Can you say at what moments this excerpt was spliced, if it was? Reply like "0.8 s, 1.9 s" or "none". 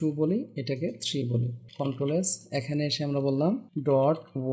1.6 s, 3.7 s